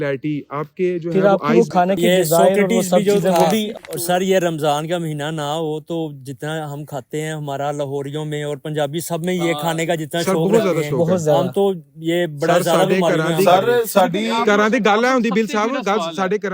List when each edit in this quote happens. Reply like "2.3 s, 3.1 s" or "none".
3.6 s